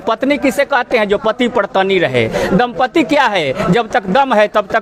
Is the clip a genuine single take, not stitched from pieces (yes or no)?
yes